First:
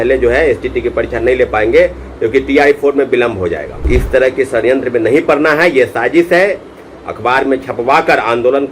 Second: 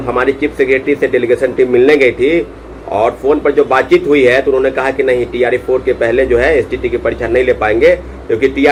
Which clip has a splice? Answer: first; 1 cut; at 3.9 s

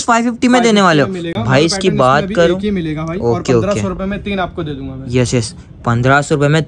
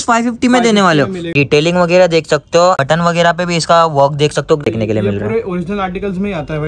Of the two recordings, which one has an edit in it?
second; 3 cuts; at 1.3 s, 2.8 s, 4.6 s

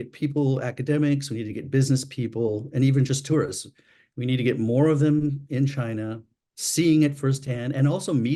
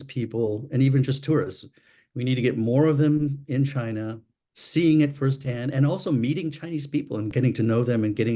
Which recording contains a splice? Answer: second; 1 cut; at 7.3 s

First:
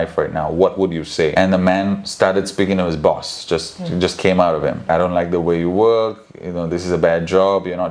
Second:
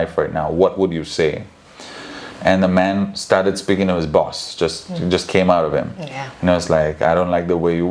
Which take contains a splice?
first; 2 cuts; at 1.3 s, 4.9 s

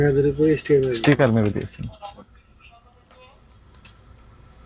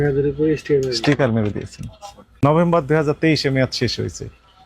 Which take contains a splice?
second; 1 cut; at 2.4 s

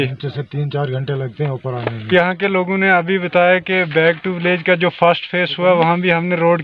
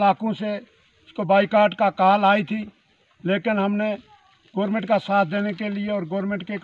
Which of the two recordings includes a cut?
first; 1 cut; at 2.1 s

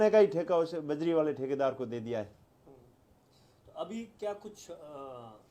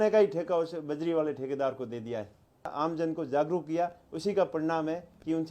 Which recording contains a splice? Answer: second; 1 cut; at 2.7 s

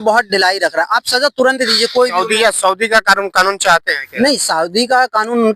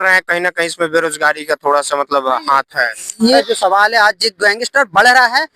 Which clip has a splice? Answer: second; 1 cut; at 3.4 s

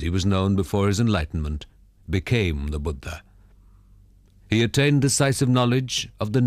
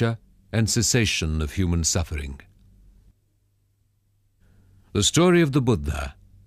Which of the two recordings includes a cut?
second; 1 cut; at 3.7 s

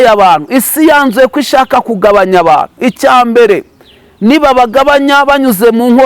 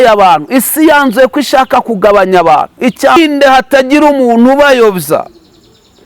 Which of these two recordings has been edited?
second; 1 cut; at 3.2 s

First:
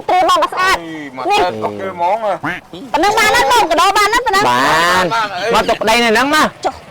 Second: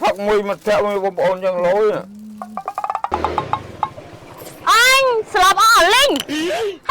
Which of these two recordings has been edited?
second; 1 cut; at 2.5 s

